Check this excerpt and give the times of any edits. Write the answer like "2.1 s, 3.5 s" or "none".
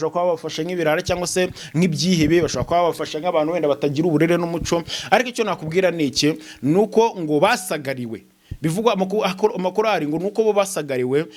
none